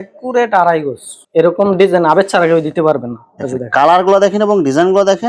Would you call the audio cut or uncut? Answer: cut